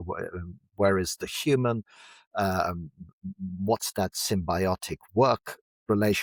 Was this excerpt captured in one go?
yes; 0 cuts

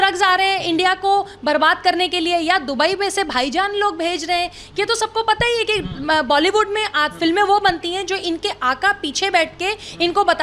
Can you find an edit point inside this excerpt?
no; 0 cuts

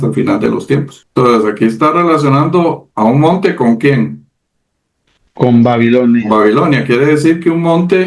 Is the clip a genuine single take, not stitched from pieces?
no; 1 cut; at 1.0 s

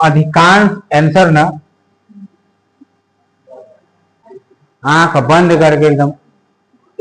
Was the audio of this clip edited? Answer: yes; 1 cut; at 4.1 s

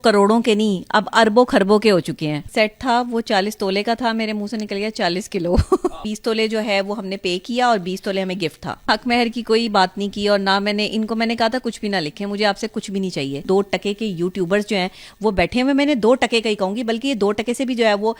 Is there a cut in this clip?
yes; 4 cuts; at 2.4 s, 6.0 s, 8.9 s, 13.4 s

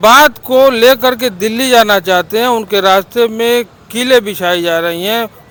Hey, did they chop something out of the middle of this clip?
no; 0 cuts

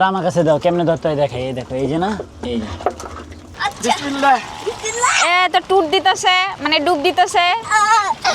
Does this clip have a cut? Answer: yes; 1 cut; at 3.4 s

